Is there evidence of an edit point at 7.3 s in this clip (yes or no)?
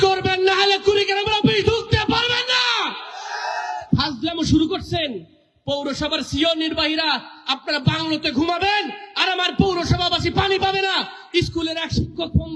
no